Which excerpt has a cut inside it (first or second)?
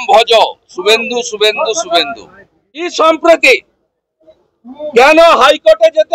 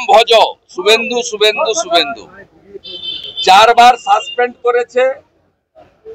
first